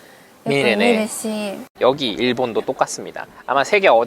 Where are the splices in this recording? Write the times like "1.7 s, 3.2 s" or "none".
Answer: 1.6 s

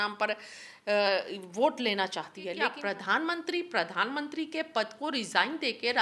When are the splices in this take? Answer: 2.7 s

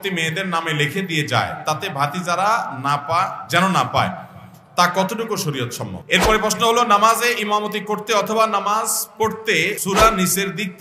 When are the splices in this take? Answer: 5.9 s, 9.8 s

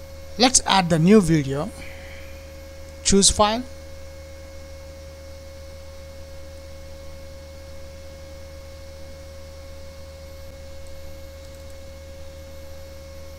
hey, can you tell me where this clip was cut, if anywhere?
none

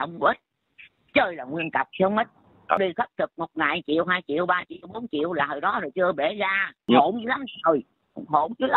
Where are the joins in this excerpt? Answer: 2.8 s, 6.7 s

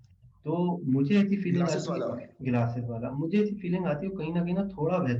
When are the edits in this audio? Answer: none

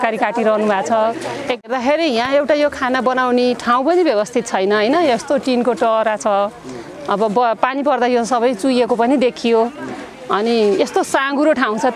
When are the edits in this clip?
1.6 s

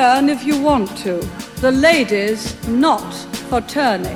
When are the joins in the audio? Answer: none

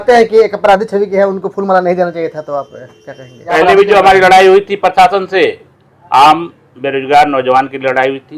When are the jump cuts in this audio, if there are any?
3.5 s

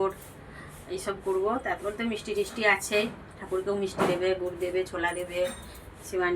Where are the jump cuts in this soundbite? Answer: none

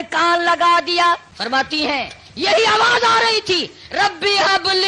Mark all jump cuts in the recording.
1.3 s

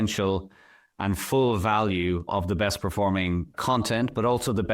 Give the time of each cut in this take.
2.3 s

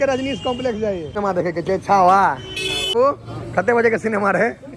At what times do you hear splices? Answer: 1.1 s, 2.9 s

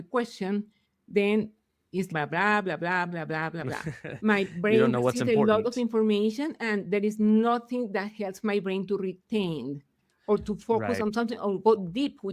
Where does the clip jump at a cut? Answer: 2.1 s

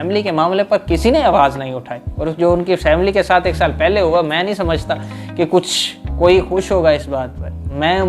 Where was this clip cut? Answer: 2.0 s

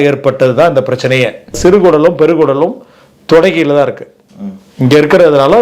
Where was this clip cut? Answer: 1.6 s

